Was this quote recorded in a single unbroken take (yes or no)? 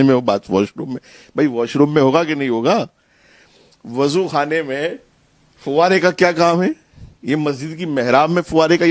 yes